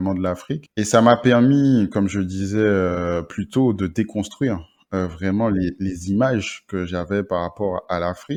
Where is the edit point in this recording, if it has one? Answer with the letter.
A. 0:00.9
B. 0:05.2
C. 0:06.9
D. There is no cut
D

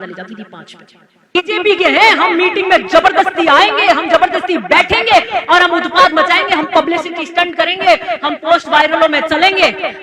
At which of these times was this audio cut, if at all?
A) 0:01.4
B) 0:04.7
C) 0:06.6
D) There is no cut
A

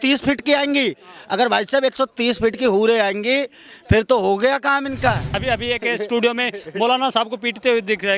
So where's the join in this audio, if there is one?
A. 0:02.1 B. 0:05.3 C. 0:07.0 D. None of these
B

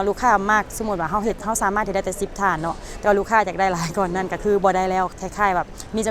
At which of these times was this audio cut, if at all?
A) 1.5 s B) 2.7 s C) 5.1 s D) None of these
C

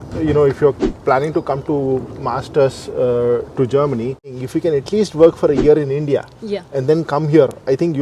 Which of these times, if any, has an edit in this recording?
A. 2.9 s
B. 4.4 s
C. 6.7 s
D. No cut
B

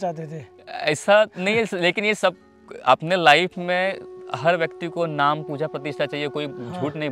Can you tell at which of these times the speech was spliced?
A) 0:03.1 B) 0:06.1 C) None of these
C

